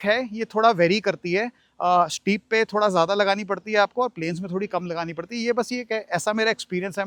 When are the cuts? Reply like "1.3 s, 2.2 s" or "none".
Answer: none